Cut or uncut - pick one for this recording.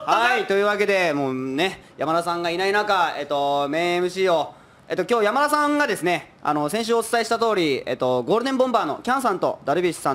cut